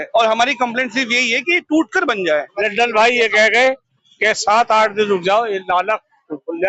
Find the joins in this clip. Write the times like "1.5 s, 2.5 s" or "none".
2.6 s